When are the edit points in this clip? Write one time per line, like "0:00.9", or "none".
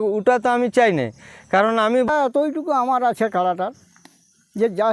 0:02.1